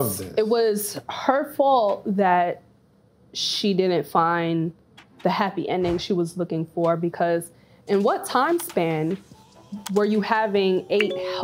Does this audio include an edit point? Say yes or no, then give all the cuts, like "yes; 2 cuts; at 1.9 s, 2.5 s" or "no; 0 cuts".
no; 0 cuts